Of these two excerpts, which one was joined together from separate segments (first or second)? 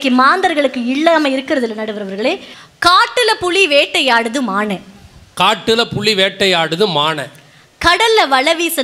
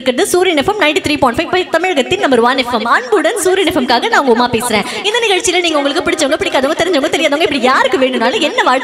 first